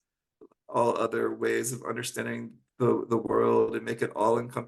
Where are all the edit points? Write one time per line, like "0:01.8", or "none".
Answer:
none